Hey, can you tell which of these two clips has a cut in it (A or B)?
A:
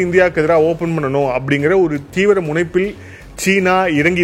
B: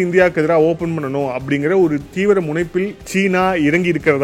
B